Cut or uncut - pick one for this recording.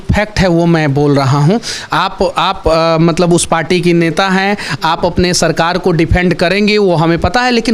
uncut